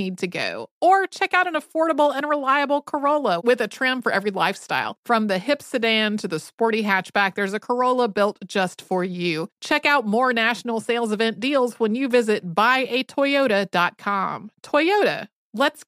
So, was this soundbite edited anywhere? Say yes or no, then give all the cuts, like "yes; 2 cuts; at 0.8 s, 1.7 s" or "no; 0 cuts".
no; 0 cuts